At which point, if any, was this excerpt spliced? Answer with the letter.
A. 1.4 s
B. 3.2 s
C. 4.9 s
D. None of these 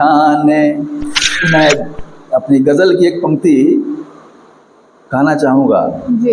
A